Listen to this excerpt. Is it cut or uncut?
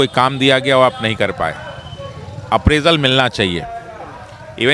uncut